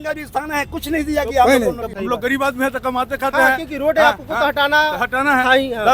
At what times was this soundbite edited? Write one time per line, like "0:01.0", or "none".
0:01.8